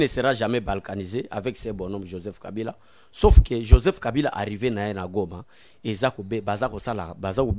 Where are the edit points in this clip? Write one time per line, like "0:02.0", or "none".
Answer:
none